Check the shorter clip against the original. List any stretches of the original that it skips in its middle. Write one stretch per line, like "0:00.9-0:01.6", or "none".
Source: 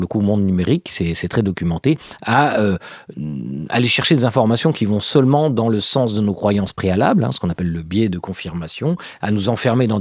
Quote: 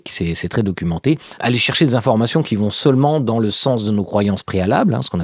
0:02.1-0:03.6